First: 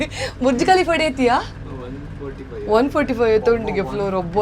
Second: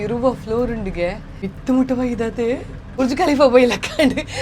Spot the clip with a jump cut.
second; 2 cuts; at 1.5 s, 3.0 s

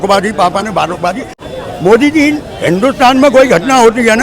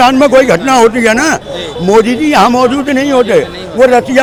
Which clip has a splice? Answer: first; 1 cut; at 1.4 s

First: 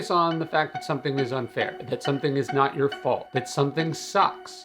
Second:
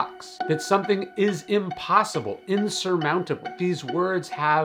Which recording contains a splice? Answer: first; 2 cuts; at 1.8 s, 3.3 s

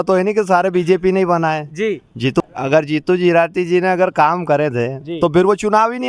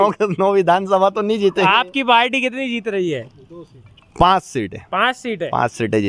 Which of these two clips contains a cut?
first; 1 cut; at 2.4 s

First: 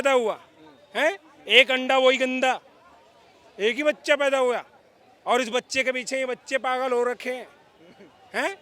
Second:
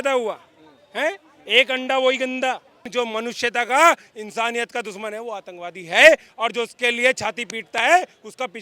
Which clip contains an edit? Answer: second; 1 cut; at 2.8 s

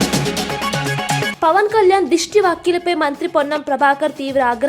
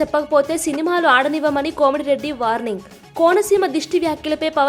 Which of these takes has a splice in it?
first; 1 cut; at 1.3 s

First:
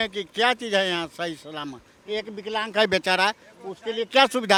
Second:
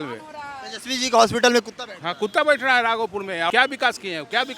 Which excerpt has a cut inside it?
second; 1 cut; at 3.5 s

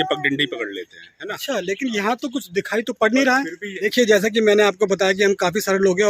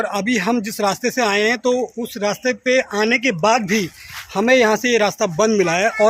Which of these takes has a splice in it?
first; 1 cut; at 3.6 s

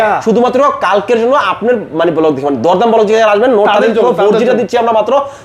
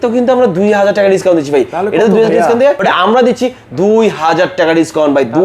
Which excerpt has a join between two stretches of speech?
second; 1 cut; at 2.8 s

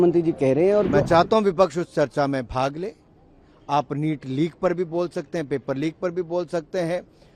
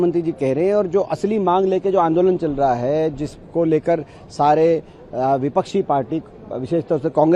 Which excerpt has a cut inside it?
first; 1 cut; at 1.0 s

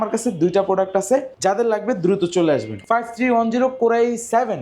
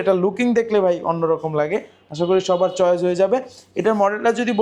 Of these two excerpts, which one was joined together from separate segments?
first; 2 cuts; at 1.3 s, 2.8 s

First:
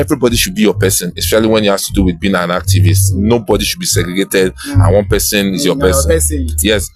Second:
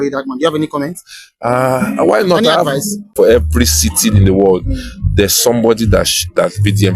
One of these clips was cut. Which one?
second; 1 cut; at 3.1 s

